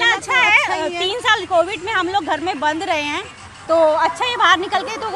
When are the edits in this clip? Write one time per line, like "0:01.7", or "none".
none